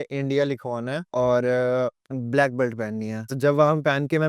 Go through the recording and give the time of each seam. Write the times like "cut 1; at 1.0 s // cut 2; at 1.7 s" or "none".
cut 1; at 1.0 s // cut 2; at 2.1 s // cut 3; at 3.3 s